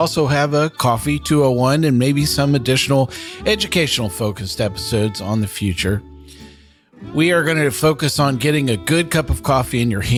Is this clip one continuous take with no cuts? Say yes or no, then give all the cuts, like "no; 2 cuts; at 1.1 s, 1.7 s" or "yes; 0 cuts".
yes; 0 cuts